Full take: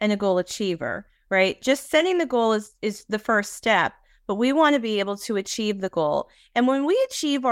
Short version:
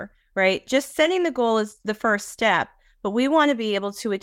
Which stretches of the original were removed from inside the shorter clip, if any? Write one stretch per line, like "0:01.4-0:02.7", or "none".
0:02.7-0:03.0